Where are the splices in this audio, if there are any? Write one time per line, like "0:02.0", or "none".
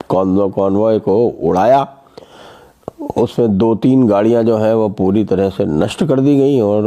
none